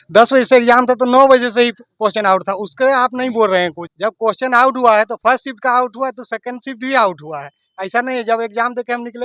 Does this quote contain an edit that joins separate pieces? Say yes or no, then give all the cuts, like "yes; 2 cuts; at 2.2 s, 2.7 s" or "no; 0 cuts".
no; 0 cuts